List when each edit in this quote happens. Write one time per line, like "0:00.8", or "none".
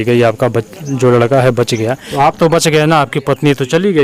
0:02.0

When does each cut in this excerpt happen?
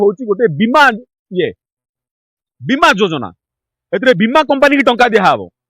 none

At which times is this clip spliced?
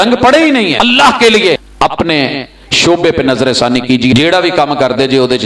0:00.8
0:01.6
0:04.2

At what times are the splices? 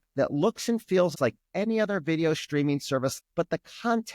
0:01.1
0:03.2

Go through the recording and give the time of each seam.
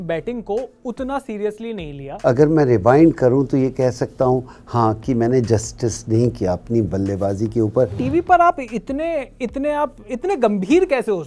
0:02.0
0:08.0

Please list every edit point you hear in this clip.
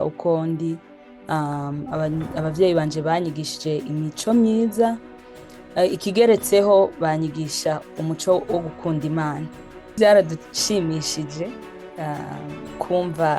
0:10.0

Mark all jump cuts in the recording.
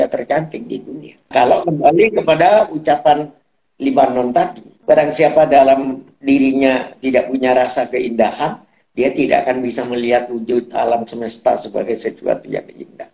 0:01.3
0:04.7

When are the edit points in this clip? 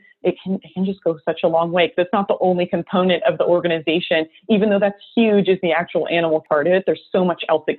0:06.4

